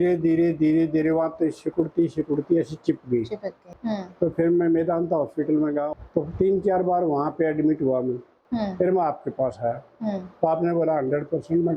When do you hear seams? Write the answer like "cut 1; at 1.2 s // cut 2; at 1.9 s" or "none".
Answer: cut 1; at 3.6 s // cut 2; at 5.9 s // cut 3; at 8.3 s